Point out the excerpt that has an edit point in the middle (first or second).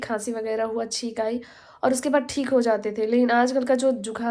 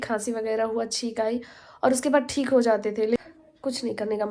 second